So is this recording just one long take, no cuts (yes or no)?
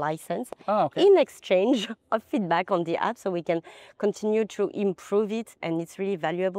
yes